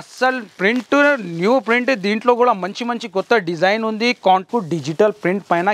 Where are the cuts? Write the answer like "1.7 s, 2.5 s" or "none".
4.5 s

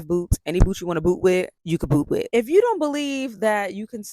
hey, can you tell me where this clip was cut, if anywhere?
2.2 s

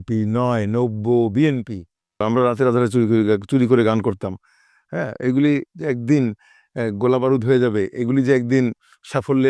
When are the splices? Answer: 2.2 s

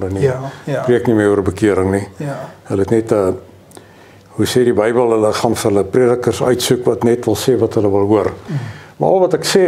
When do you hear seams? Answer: 8.4 s

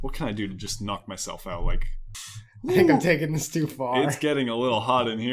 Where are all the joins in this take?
2.1 s

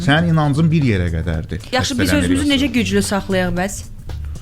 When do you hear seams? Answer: 1.6 s

